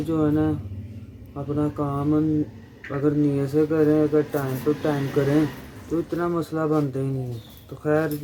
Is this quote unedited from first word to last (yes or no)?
yes